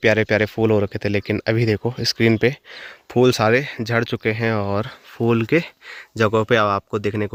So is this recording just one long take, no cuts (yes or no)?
yes